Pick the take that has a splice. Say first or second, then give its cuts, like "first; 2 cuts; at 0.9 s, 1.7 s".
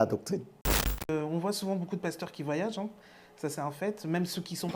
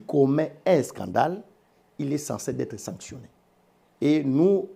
first; 1 cut; at 1.0 s